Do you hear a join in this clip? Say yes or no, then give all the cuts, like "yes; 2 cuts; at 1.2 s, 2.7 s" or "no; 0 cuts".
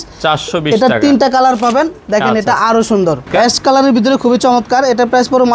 yes; 1 cut; at 3.3 s